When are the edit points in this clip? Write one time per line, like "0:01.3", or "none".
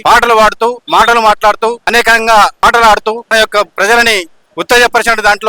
0:00.8
0:02.1
0:03.3